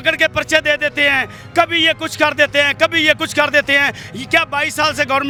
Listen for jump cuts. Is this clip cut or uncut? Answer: uncut